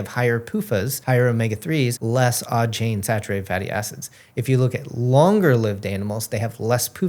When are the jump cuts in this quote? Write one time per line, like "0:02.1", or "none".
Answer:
0:01.0
0:02.0